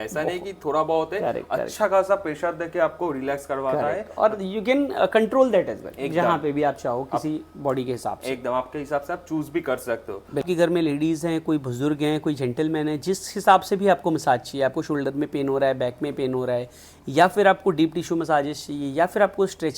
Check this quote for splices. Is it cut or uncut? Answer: cut